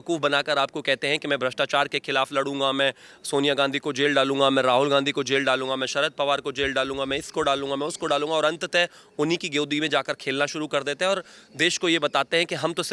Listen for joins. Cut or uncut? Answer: uncut